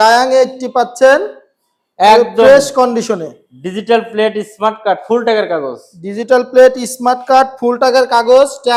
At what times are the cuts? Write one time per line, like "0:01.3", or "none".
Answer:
none